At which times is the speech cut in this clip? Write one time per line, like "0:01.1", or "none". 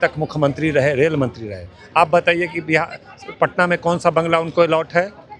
none